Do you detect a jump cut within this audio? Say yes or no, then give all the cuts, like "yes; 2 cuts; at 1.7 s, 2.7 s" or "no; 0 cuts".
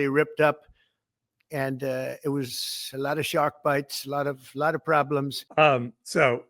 yes; 1 cut; at 5.4 s